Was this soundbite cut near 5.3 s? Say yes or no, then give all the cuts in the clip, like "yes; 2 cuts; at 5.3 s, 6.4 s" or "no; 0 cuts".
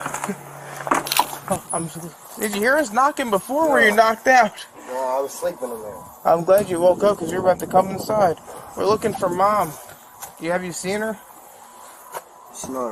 no; 1 cut; at 1.4 s